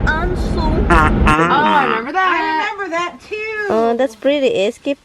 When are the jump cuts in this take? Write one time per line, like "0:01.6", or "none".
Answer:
0:01.4